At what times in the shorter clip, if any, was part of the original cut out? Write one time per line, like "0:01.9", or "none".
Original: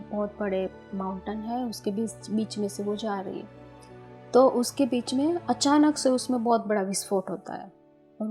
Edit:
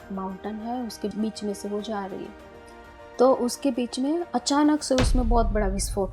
0:01.1